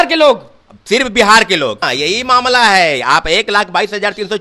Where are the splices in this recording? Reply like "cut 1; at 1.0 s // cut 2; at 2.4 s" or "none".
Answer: cut 1; at 1.8 s